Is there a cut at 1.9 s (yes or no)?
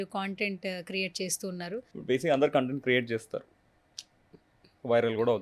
yes